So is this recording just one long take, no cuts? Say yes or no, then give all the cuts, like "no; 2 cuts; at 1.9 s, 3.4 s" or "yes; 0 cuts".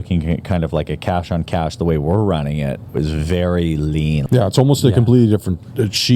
no; 1 cut; at 4.2 s